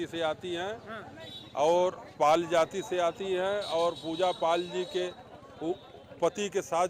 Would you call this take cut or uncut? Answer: uncut